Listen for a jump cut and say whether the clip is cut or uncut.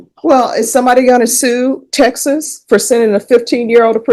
uncut